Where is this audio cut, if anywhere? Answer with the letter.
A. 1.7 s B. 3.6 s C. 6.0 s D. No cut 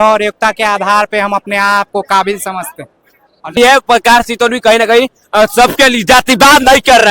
B